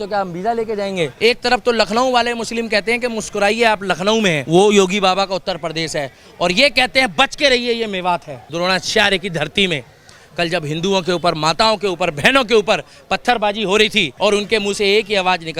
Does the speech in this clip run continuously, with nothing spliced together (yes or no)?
no